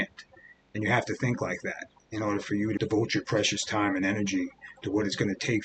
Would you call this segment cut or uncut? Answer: cut